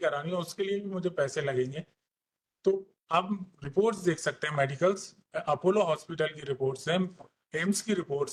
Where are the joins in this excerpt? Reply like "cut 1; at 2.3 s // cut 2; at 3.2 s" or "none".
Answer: none